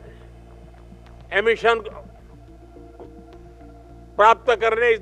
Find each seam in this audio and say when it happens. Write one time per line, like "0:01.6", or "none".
0:02.0
0:04.1